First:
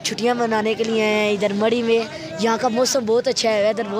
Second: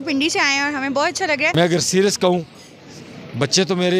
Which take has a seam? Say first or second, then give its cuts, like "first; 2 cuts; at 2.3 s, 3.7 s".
second; 1 cut; at 1.5 s